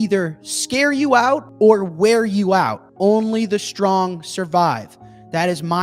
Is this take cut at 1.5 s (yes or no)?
yes